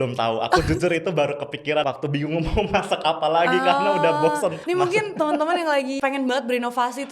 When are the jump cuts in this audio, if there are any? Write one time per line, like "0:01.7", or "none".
0:01.8
0:04.6
0:05.9